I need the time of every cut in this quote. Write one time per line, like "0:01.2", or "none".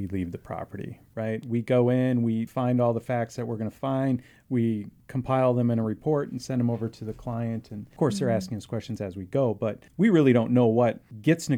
none